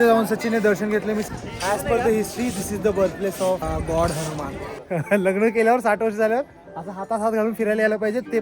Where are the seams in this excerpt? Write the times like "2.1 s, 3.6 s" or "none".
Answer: 1.3 s, 3.6 s, 4.7 s